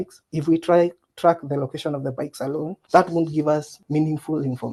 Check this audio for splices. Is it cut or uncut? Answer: uncut